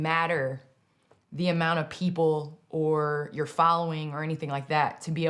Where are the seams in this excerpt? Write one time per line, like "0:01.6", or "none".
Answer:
none